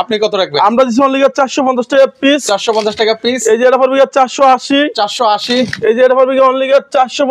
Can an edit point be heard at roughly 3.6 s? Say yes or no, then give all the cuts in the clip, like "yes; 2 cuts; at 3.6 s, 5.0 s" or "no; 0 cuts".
no; 0 cuts